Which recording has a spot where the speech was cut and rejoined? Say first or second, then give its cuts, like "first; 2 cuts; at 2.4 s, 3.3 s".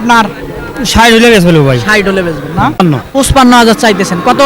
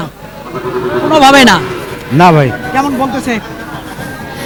first; 1 cut; at 2.9 s